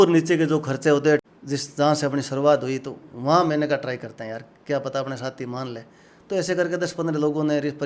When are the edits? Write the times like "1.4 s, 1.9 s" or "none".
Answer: 1.2 s